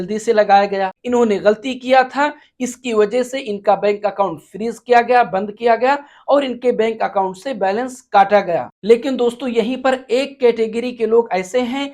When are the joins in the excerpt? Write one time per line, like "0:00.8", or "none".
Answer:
0:00.9